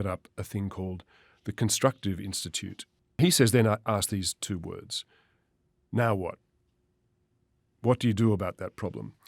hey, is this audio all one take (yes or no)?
no